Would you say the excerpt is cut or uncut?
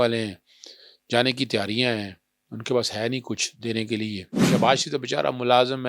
cut